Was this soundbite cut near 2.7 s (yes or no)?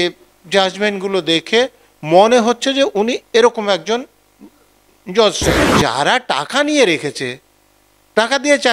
no